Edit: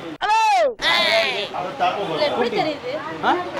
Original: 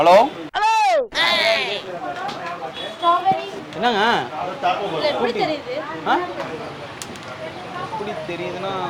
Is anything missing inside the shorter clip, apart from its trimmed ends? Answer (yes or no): yes